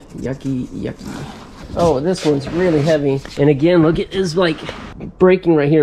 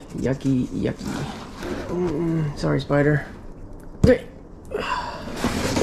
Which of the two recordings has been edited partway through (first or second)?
first